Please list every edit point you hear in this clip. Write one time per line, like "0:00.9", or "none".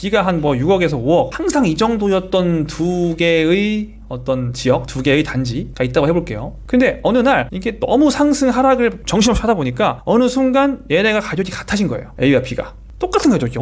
none